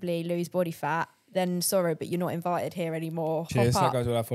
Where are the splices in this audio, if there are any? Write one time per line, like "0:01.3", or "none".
0:03.5

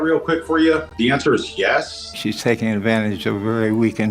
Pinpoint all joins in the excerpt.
0:00.9
0:02.2

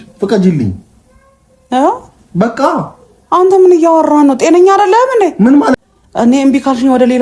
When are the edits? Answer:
0:05.8

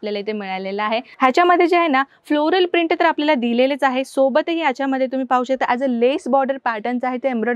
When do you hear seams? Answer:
0:01.1

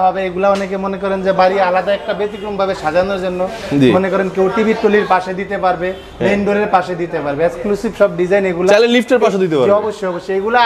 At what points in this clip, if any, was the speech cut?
none

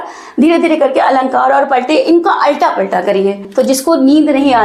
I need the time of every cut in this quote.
0:03.4

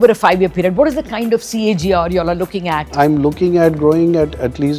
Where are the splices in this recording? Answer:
0:02.9

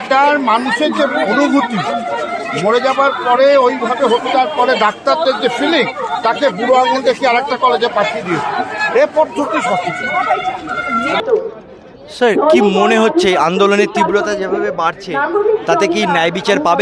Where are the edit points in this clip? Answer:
none

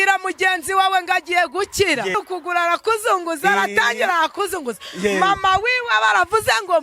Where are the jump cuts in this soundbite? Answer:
0:02.1

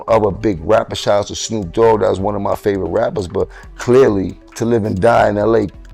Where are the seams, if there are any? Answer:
none

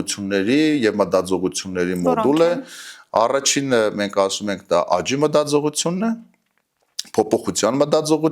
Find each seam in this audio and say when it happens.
none

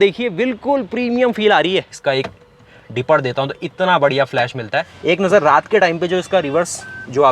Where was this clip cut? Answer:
0:01.9
0:04.9

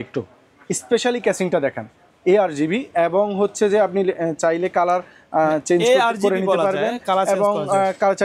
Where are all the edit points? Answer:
none

